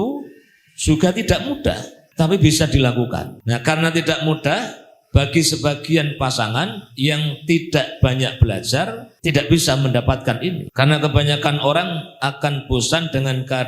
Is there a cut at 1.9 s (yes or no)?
yes